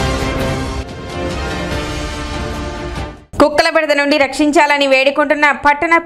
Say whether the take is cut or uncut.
cut